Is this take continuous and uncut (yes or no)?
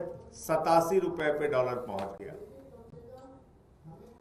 yes